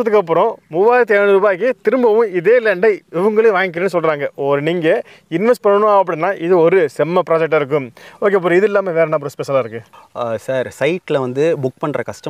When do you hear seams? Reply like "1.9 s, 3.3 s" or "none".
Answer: none